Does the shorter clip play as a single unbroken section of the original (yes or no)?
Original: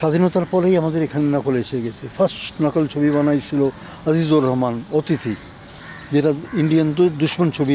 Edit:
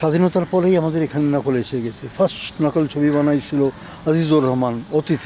yes